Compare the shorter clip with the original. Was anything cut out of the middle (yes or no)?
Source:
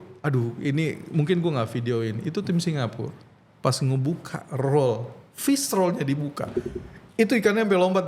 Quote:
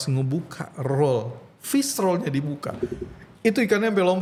no